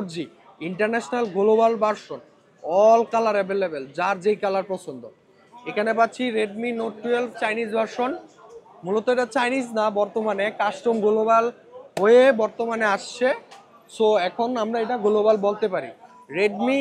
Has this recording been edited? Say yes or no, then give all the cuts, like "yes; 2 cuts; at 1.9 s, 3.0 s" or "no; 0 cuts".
no; 0 cuts